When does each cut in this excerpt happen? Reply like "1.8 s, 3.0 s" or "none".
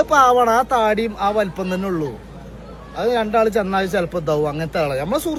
none